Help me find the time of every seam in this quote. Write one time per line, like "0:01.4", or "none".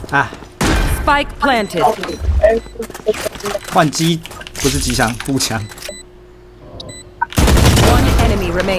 0:05.9